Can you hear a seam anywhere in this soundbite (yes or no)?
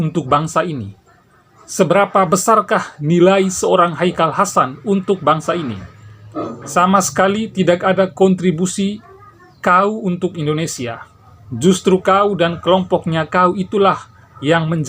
yes